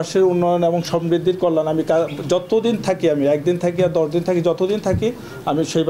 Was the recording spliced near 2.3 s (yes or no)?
no